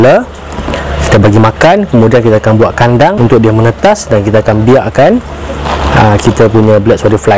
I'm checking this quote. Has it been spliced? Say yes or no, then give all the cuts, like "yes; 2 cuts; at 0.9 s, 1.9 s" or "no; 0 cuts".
no; 0 cuts